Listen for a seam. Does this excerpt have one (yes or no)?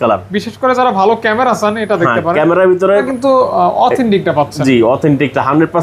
yes